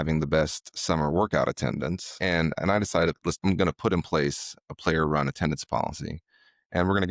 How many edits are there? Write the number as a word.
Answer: two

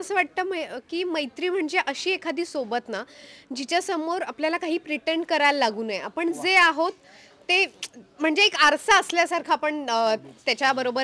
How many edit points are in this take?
zero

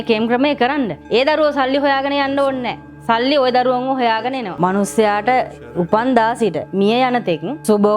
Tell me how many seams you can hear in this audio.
two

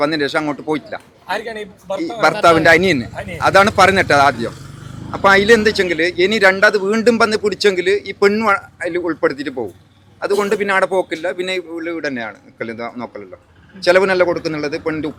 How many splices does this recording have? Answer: zero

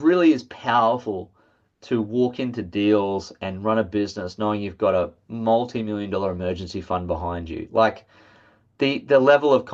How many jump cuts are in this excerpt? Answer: zero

